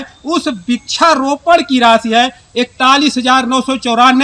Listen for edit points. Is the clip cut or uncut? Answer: uncut